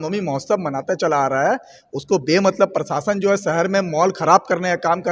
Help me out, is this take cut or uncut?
uncut